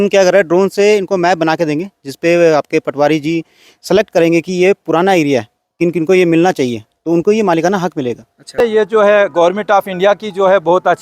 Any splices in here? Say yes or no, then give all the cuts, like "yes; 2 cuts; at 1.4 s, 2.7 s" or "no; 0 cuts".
yes; 1 cut; at 8.5 s